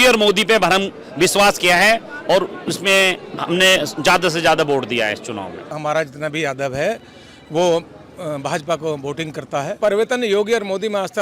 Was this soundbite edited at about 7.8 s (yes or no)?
no